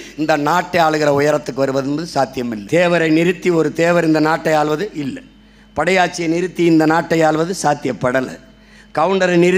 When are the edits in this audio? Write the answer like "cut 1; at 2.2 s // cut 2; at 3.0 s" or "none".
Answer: cut 1; at 2.6 s